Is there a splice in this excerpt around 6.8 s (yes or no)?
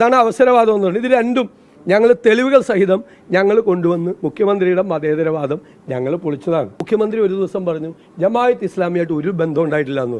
yes